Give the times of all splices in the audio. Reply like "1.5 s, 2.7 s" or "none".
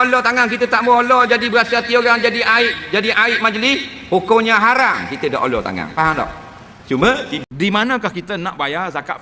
7.4 s